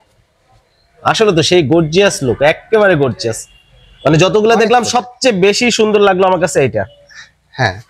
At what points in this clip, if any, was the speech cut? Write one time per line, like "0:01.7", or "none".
none